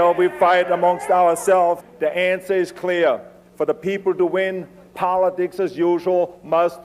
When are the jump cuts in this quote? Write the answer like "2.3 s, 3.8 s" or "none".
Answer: none